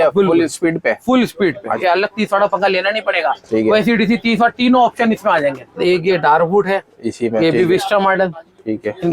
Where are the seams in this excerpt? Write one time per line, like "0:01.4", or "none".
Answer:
0:01.8
0:05.8